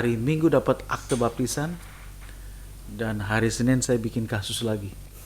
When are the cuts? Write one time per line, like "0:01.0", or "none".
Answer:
none